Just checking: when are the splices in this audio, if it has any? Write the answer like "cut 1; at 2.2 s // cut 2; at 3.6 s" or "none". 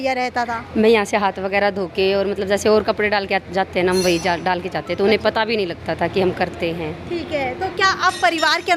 none